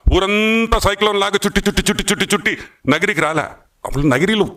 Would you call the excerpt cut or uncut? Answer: uncut